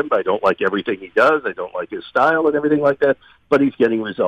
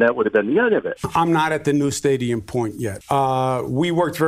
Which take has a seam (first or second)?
second